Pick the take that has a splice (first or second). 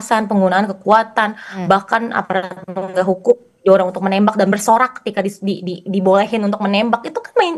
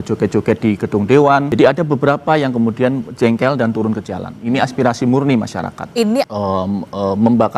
second